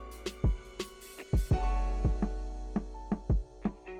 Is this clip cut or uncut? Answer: uncut